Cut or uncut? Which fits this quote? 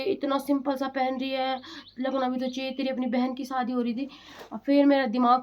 uncut